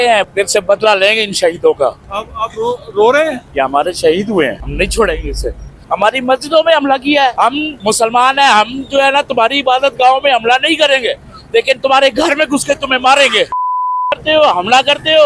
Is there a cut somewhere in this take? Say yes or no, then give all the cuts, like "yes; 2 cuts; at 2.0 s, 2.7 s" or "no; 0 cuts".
yes; 5 cuts; at 3.4 s, 4.6 s, 5.7 s, 7.5 s, 13.5 s